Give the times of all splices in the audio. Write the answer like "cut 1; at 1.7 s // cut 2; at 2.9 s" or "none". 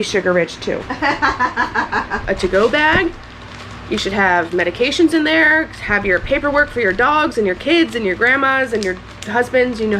cut 1; at 2.1 s